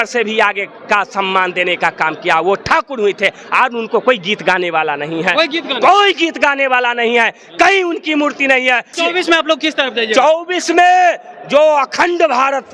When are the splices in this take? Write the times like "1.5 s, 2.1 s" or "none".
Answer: 9.0 s